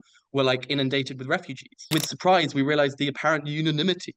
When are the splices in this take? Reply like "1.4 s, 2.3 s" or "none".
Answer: 1.8 s